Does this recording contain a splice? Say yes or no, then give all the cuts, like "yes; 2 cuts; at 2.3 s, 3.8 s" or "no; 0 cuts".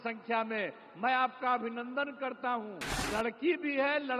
yes; 1 cut; at 2.9 s